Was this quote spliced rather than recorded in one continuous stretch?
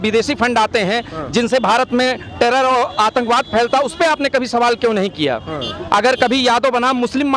no; 0 cuts

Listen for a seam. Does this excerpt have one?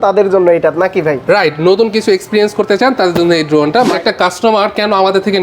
yes; 1 cut; at 3.9 s

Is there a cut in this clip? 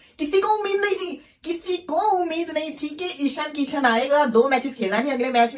no; 0 cuts

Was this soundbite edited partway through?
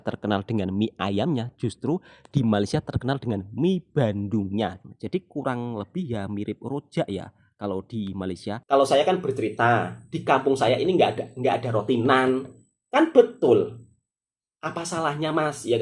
yes; 2 cuts; at 4.8 s, 8.5 s

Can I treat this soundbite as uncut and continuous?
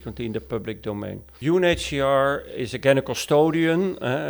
no; 1 cut; at 1.3 s

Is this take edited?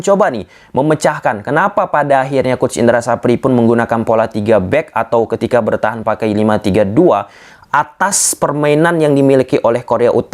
no; 0 cuts

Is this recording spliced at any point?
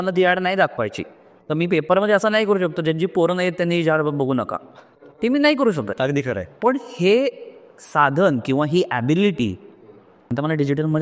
no; 0 cuts

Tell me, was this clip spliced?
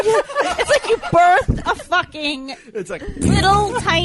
no; 0 cuts

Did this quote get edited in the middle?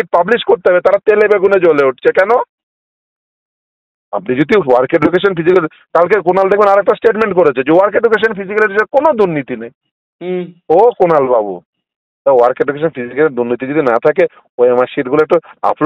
no; 0 cuts

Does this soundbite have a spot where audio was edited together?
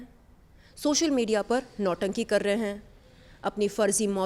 no; 0 cuts

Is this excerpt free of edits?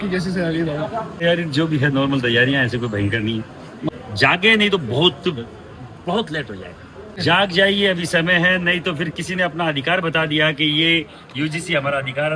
no; 3 cuts; at 1.2 s, 3.9 s, 7.2 s

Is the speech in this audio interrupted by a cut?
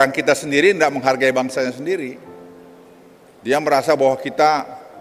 no; 0 cuts

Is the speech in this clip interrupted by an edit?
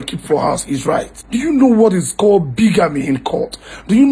yes; 1 cut; at 1.5 s

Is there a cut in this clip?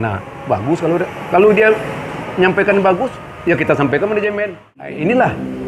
yes; 1 cut; at 4.7 s

